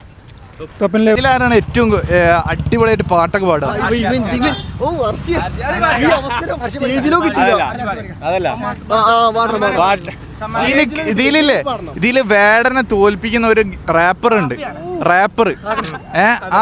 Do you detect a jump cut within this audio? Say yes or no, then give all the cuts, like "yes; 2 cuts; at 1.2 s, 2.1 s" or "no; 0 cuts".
yes; 1 cut; at 1.2 s